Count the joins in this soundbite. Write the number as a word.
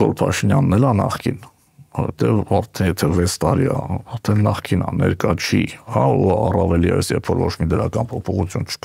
zero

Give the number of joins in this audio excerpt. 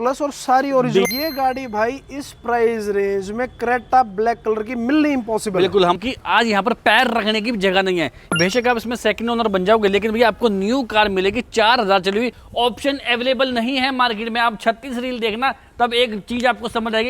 four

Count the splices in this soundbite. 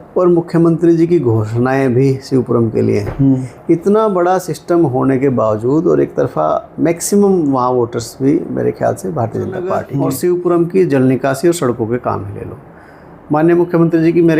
one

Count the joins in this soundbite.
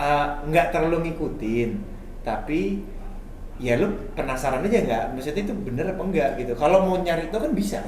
zero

